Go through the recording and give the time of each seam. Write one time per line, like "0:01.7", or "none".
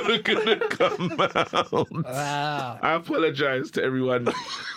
0:02.7